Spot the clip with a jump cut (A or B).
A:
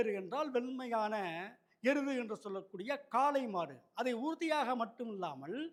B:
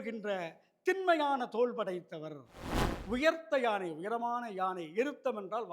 B